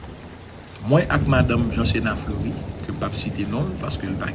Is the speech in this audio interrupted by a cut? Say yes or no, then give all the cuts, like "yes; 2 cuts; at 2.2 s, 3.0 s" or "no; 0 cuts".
no; 0 cuts